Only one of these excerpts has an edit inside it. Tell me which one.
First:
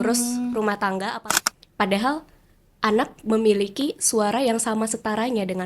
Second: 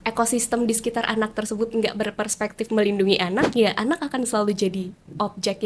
first; 1 cut; at 1.2 s

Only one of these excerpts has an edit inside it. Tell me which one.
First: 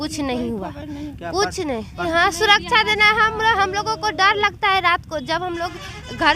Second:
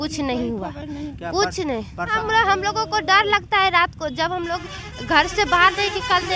second; 1 cut; at 2.1 s

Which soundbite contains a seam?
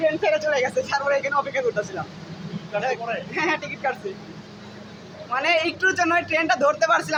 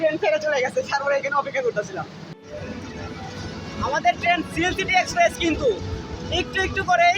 second; 1 cut; at 2.3 s

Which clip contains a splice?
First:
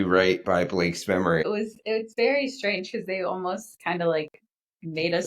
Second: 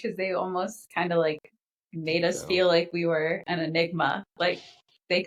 first; 1 cut; at 1.4 s

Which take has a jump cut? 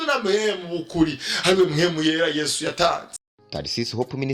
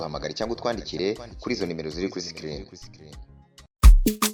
first; 1 cut; at 3.3 s

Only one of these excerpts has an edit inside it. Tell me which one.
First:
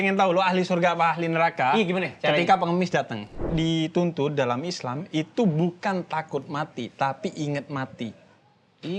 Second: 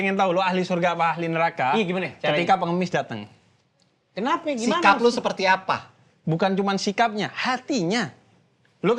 first; 1 cut; at 3.4 s

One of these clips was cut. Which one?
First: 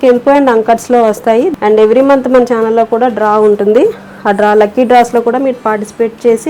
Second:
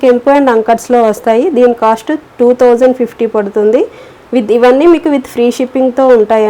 first; 1 cut; at 1.5 s

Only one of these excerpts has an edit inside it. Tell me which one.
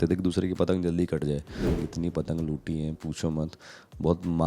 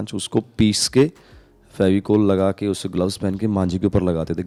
first; 1 cut; at 1.6 s

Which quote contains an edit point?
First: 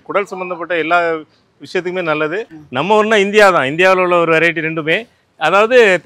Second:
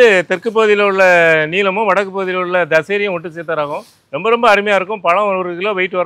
first; 1 cut; at 2.6 s

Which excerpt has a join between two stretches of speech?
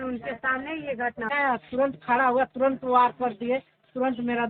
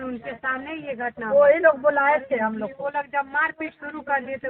first; 1 cut; at 1.3 s

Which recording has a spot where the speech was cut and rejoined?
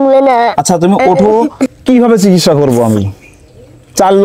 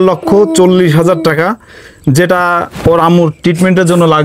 first; 1 cut; at 1.7 s

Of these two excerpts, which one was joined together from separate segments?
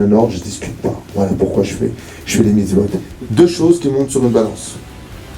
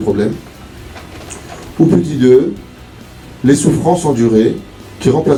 first; 1 cut; at 3.0 s

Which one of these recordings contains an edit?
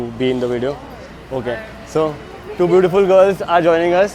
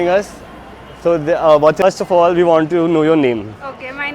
second; 1 cut; at 1.8 s

